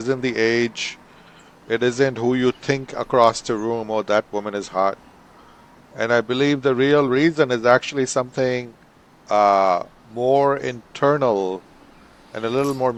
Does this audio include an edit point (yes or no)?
no